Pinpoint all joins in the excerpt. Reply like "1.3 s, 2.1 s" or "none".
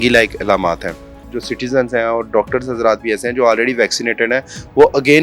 1.3 s